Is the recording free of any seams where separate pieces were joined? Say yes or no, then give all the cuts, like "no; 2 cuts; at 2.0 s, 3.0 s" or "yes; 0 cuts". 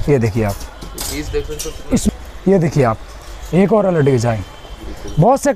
no; 1 cut; at 2.1 s